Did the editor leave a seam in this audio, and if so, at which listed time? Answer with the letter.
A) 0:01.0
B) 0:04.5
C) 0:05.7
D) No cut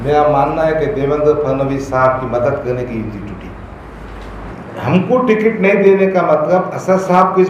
B